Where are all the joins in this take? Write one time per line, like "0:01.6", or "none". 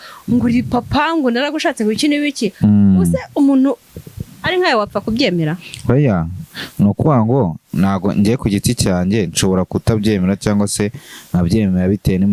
none

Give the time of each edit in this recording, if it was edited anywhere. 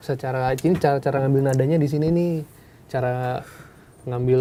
none

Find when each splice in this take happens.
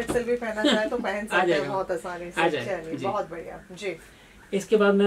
none

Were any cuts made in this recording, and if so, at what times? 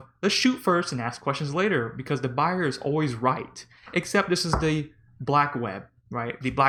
none

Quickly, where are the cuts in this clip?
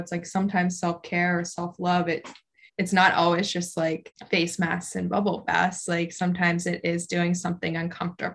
0:02.6
0:04.1

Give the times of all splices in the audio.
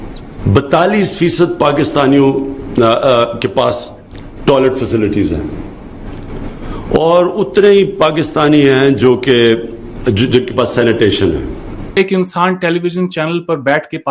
0:12.0

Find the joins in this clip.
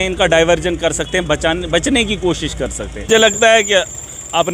0:03.1

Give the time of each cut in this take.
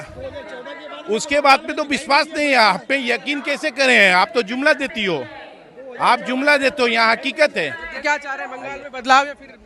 0:08.0

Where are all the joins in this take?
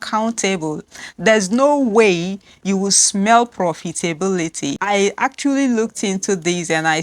0:04.8

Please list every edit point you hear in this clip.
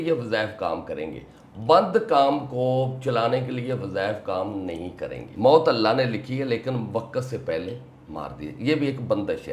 0:05.2

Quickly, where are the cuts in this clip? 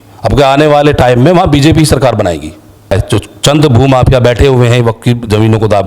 0:02.9

